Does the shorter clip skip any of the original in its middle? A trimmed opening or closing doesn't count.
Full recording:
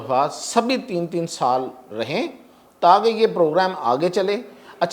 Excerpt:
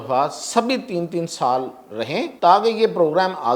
yes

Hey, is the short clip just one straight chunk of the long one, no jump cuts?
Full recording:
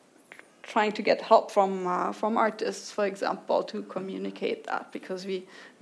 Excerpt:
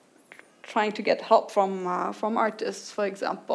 yes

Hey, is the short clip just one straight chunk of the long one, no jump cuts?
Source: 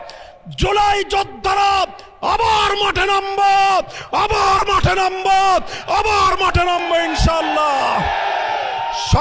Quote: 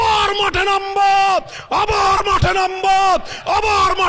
yes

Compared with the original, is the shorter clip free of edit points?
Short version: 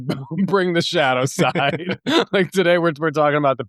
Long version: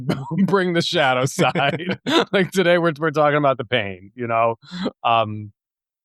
yes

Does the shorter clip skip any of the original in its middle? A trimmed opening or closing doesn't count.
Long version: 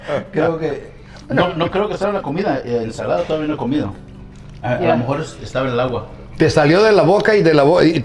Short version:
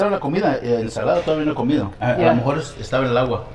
yes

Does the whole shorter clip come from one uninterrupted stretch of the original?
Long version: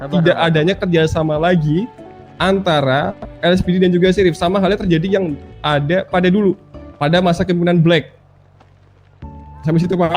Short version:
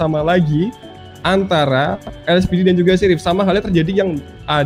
yes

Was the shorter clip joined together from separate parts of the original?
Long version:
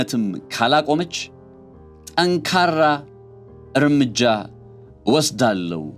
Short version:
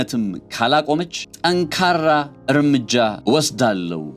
yes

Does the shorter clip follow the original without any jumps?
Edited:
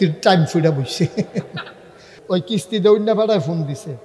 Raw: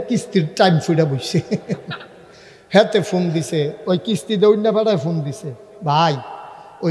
no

